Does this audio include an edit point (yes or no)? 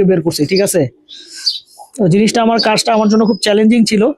no